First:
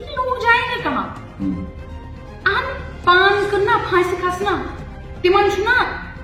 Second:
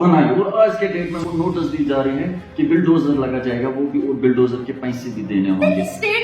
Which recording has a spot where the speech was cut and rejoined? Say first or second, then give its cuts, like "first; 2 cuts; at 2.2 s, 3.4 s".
second; 1 cut; at 1.2 s